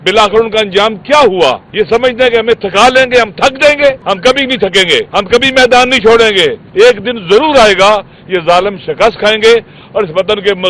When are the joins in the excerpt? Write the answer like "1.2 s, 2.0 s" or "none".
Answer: 1.6 s, 4.0 s, 5.1 s, 6.6 s